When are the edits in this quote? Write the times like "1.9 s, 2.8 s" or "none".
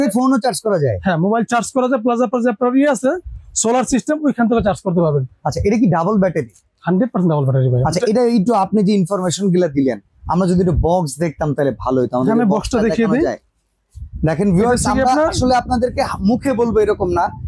none

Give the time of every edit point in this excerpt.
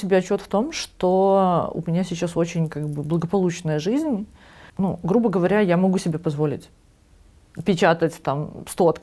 none

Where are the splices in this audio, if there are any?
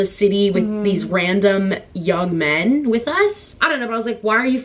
3.5 s

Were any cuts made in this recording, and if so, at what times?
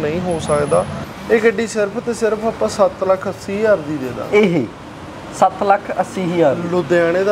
0.9 s

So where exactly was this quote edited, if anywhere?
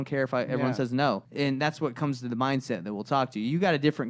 1.3 s

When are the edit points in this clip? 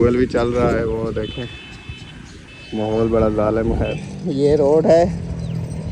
3.9 s

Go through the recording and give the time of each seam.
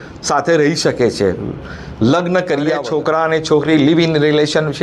2.8 s

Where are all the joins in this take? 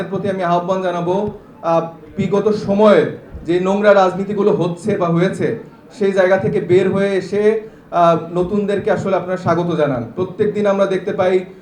none

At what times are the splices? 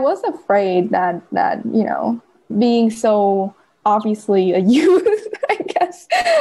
2.5 s, 3.7 s

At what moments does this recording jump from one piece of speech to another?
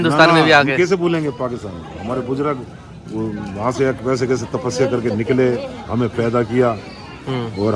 none

